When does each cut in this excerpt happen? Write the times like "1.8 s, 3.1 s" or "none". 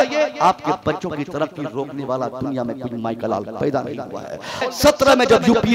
4.6 s